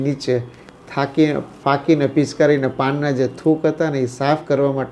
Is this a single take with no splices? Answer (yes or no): yes